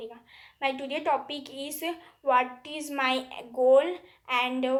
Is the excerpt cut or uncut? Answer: uncut